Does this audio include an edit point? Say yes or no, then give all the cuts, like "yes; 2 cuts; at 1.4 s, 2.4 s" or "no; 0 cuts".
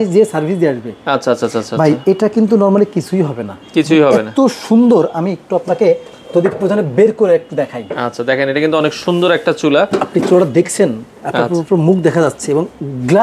no; 0 cuts